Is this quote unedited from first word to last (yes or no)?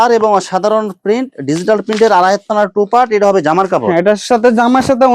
yes